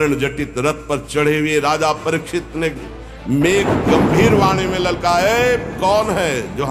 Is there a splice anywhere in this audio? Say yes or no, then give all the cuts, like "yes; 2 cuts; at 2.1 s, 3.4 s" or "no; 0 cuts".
no; 0 cuts